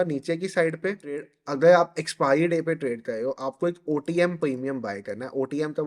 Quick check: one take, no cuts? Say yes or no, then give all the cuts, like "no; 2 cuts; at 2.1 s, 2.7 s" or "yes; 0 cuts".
no; 1 cut; at 1.4 s